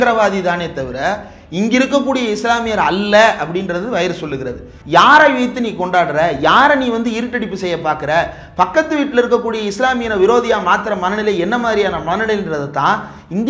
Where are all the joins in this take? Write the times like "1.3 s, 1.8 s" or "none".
4.7 s